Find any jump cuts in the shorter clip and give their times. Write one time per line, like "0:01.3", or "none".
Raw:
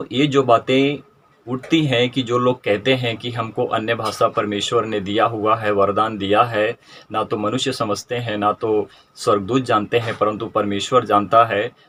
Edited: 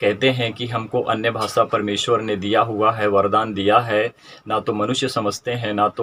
none

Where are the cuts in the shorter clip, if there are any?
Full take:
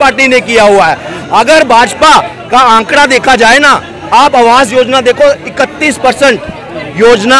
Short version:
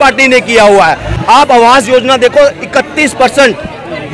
0:01.1

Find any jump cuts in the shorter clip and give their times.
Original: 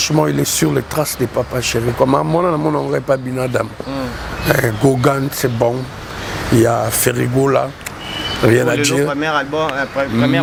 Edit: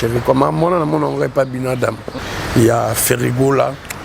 0:02.1

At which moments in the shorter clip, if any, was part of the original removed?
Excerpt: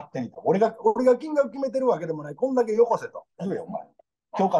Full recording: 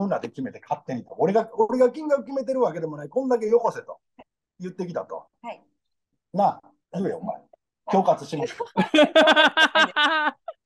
0:03.2

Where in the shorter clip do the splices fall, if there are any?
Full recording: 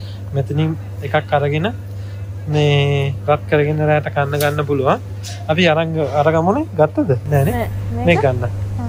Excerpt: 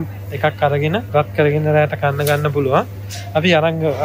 0:01.1

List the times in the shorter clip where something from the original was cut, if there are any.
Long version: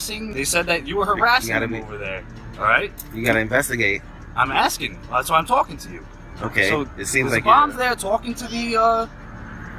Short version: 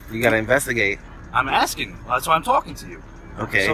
none

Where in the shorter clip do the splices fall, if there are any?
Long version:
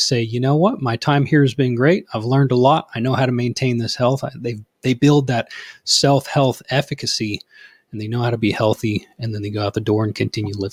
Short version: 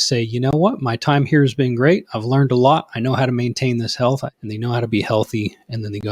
0:04.3

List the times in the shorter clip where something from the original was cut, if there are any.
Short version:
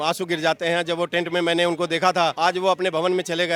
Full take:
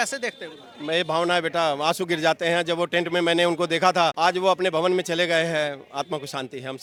none

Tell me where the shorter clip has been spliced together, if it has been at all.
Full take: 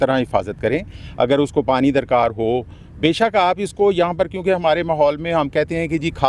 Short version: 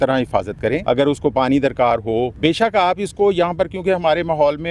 0:00.8
0:02.3

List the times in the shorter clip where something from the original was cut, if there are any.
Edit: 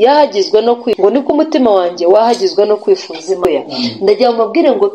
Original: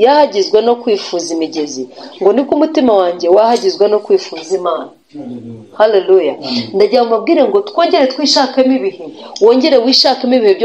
0:01.0
0:03.4

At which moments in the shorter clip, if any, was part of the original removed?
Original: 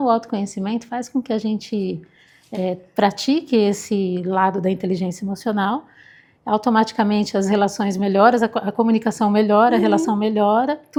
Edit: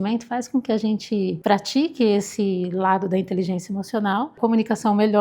0:01.4
0:04.3

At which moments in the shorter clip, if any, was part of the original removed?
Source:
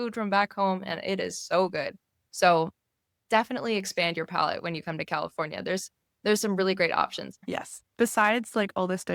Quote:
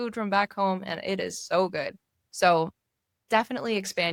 none

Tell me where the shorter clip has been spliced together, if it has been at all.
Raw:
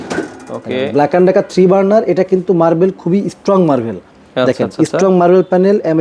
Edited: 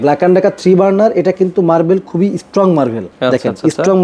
0:03.1

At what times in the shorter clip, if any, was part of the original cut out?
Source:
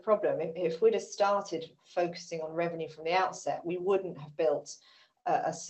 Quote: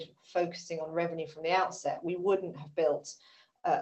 none

